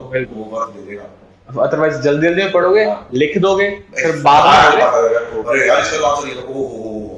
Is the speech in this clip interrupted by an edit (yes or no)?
no